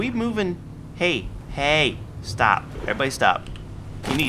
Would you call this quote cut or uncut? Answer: cut